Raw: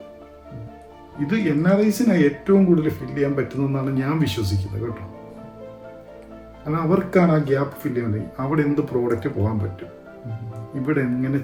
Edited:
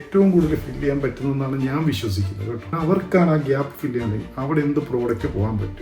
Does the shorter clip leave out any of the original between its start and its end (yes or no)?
yes